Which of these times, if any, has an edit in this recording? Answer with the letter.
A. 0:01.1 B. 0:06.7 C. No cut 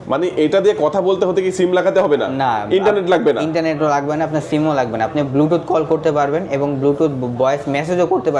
C